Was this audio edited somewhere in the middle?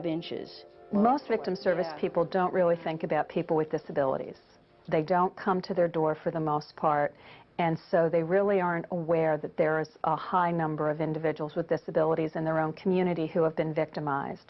no; 0 cuts

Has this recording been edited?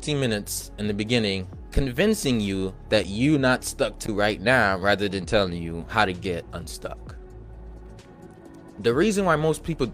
no; 0 cuts

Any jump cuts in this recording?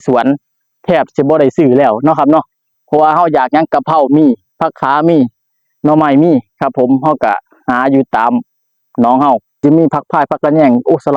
yes; 1 cut; at 9.6 s

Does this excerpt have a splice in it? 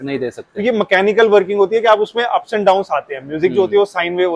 no; 0 cuts

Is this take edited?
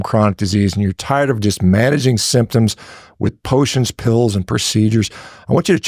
no; 0 cuts

